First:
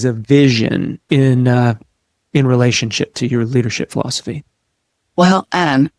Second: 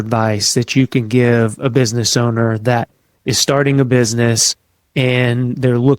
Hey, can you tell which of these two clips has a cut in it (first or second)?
first